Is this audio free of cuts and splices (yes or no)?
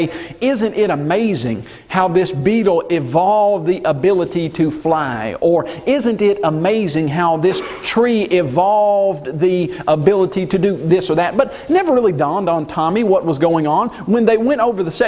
yes